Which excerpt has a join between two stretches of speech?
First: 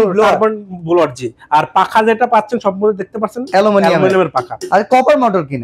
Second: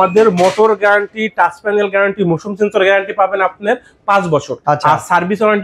second; 1 cut; at 4.5 s

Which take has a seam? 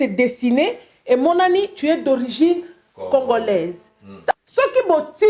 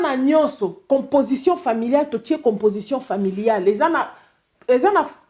first; 1 cut; at 4.3 s

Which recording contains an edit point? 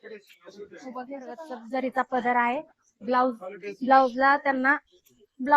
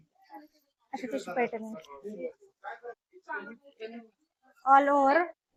first; 1 cut; at 1.5 s

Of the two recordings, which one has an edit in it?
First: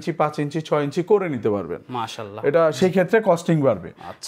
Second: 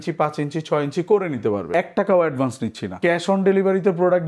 second; 2 cuts; at 1.7 s, 3.0 s

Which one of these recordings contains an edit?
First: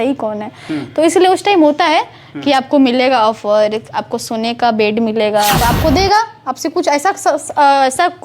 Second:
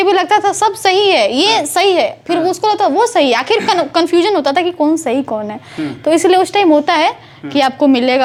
first; 1 cut; at 5.6 s

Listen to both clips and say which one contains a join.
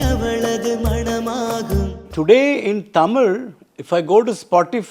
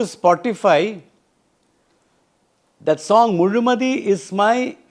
first; 1 cut; at 2.1 s

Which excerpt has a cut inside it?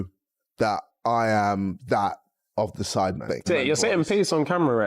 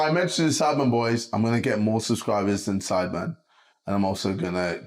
first; 1 cut; at 3.5 s

